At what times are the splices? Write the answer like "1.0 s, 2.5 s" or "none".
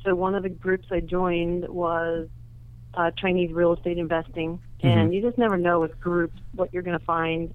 none